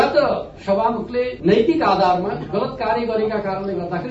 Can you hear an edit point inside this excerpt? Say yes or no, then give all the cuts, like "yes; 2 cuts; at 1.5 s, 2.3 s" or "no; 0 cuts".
no; 0 cuts